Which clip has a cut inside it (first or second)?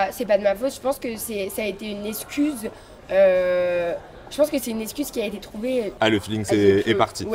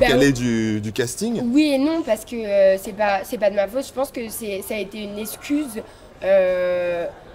first